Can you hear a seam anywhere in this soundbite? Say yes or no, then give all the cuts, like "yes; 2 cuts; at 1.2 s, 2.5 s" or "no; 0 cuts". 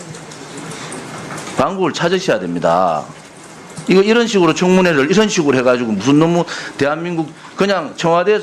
yes; 1 cut; at 3.8 s